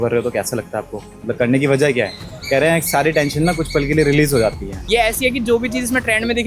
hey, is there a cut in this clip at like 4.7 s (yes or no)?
yes